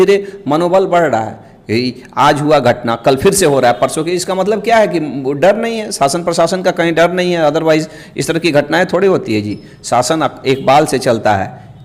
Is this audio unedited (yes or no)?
yes